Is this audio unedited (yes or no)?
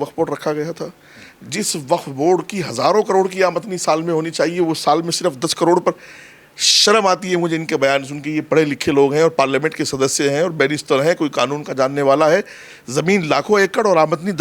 yes